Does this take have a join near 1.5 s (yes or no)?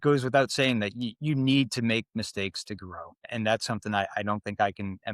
no